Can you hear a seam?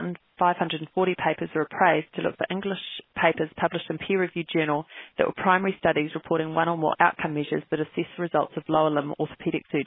no; 0 cuts

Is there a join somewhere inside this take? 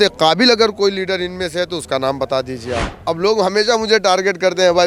yes; 1 cut; at 2.9 s

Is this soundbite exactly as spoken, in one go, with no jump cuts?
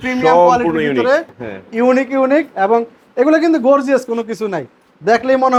yes; 0 cuts

